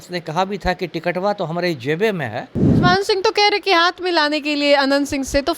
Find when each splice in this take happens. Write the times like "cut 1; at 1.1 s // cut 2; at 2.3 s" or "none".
cut 1; at 2.6 s